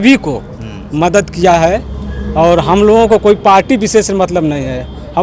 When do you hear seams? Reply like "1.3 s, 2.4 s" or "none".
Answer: none